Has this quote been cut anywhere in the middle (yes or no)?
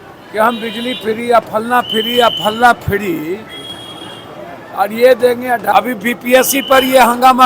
yes